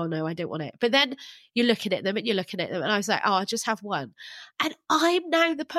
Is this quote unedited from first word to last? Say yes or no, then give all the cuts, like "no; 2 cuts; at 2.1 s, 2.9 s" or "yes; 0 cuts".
yes; 0 cuts